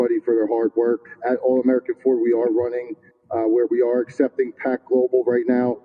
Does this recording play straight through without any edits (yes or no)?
no